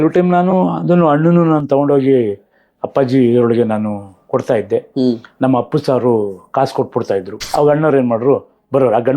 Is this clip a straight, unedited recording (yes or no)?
no